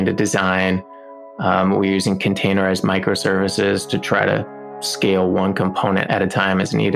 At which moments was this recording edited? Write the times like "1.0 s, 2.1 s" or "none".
4.7 s, 6.0 s